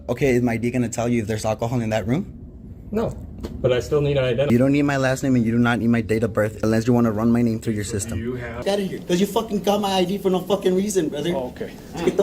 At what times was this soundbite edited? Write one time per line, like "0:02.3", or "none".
0:04.5
0:06.6
0:08.6